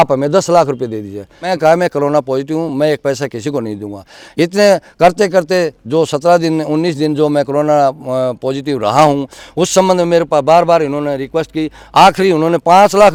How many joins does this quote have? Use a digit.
0